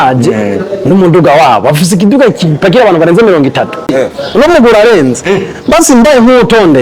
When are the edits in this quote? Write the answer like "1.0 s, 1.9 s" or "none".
3.9 s